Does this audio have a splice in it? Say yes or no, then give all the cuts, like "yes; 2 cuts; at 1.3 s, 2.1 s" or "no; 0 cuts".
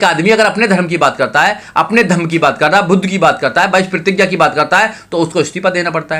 no; 0 cuts